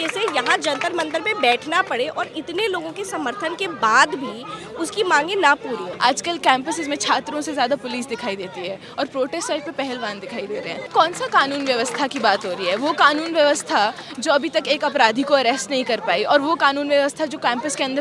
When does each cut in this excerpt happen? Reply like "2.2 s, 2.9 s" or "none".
5.9 s, 10.7 s